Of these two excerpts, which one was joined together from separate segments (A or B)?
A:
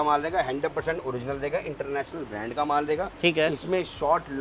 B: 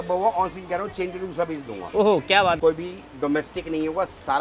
B